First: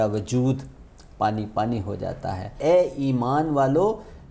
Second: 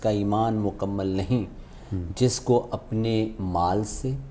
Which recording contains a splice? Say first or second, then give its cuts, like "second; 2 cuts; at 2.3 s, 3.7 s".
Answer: first; 1 cut; at 2.5 s